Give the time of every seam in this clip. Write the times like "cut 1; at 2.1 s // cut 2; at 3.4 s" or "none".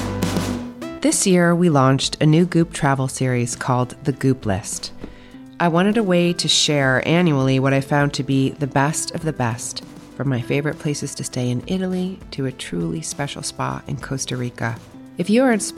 cut 1; at 0.9 s